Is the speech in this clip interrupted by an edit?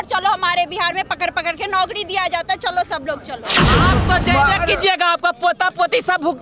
yes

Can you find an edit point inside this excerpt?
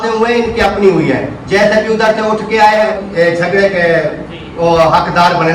yes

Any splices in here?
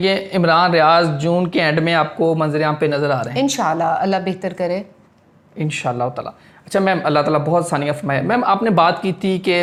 no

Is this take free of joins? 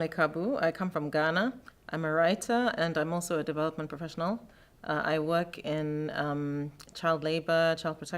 no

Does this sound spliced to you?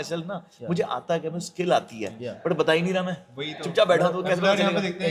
no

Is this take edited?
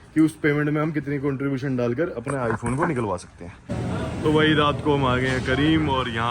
yes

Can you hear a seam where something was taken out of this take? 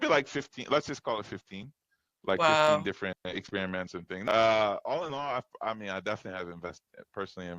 yes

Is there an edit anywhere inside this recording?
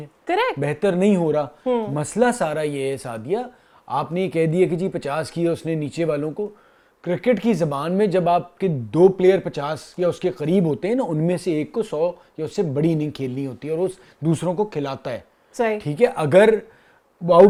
no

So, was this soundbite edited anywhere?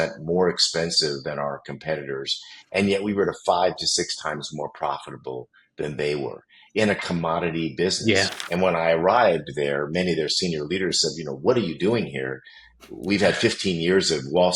yes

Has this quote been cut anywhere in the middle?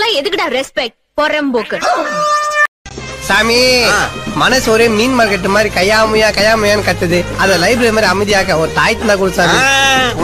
yes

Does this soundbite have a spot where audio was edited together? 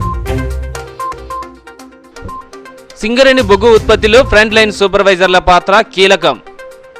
yes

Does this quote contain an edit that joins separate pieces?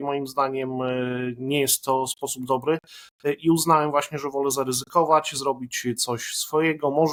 no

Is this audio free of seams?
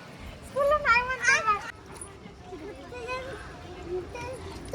no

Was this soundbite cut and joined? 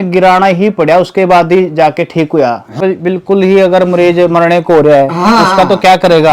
yes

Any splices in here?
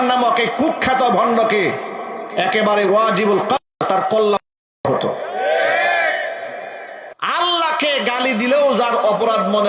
yes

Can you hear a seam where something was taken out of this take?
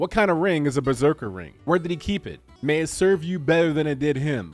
yes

